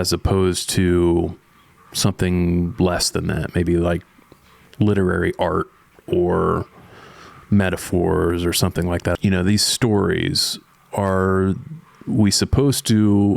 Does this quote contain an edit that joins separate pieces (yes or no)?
yes